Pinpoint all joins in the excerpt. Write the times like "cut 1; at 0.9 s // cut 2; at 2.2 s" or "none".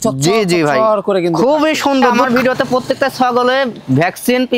cut 1; at 2.2 s